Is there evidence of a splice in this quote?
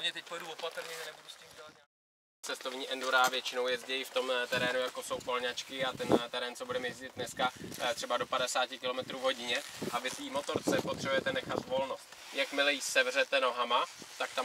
no; 0 cuts

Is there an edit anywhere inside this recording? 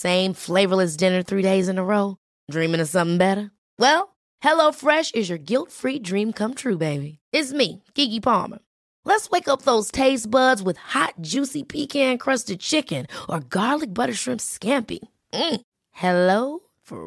no; 0 cuts

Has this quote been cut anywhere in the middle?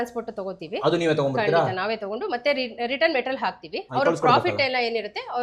no; 0 cuts

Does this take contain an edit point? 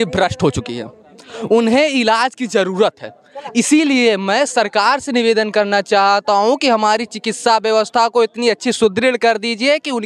no; 0 cuts

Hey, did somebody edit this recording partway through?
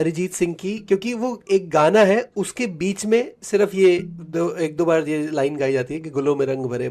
no; 0 cuts

